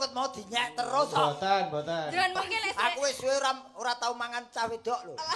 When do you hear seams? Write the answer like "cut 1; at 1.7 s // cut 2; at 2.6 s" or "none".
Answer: cut 1; at 2.6 s